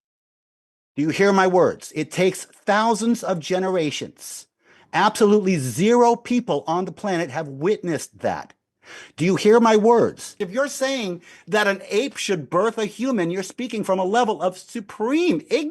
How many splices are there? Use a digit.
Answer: 1